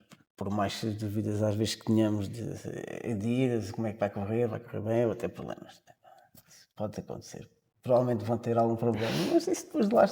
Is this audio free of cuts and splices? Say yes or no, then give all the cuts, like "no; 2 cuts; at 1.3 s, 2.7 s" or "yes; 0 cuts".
yes; 0 cuts